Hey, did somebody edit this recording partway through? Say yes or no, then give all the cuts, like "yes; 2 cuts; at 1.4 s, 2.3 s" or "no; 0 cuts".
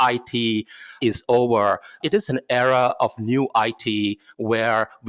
yes; 1 cut; at 2.0 s